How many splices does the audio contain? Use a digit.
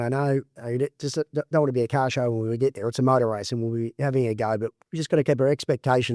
0